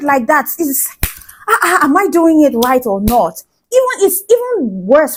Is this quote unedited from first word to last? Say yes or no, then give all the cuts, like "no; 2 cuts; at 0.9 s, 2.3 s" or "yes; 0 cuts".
yes; 0 cuts